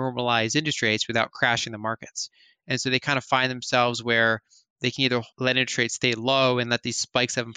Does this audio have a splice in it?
yes; 1 cut; at 5.3 s

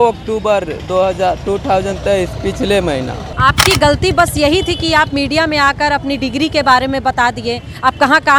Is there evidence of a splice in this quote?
yes; 1 cut; at 3.2 s

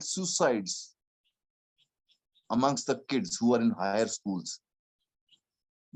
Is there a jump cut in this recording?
no; 0 cuts

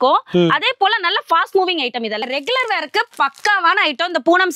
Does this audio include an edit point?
yes; 1 cut; at 2.2 s

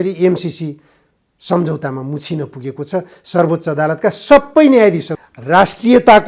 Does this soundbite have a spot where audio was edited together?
yes; 1 cut; at 5.1 s

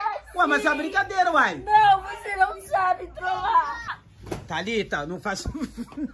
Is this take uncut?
no; 1 cut; at 4.1 s

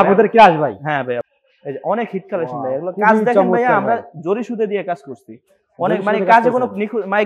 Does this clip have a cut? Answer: yes; 1 cut; at 1.2 s

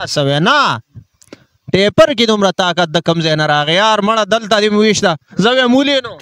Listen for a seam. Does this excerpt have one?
no; 0 cuts

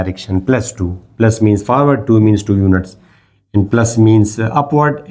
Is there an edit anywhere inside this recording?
no; 0 cuts

